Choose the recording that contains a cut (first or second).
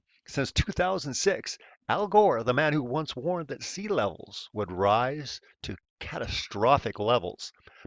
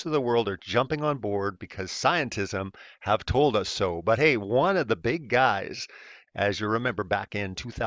second